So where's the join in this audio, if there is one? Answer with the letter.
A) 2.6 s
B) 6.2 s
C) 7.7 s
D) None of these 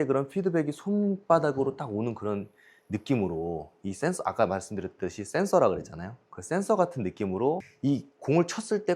C